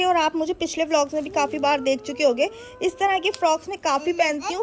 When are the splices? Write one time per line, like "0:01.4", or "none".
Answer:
none